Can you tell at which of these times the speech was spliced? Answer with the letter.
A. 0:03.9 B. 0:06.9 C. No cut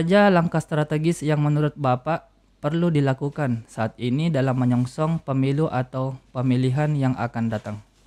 C